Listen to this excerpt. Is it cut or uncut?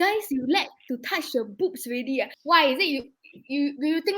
cut